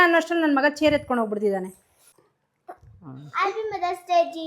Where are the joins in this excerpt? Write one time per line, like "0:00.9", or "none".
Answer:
0:02.0